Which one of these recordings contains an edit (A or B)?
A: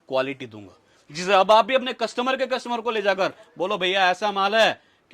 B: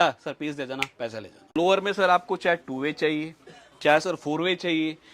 B